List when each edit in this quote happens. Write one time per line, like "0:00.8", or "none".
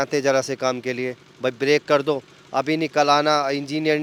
none